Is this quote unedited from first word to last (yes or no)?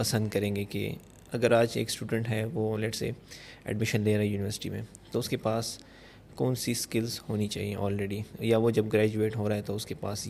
yes